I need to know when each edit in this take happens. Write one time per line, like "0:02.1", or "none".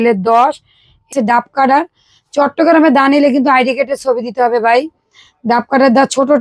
0:01.1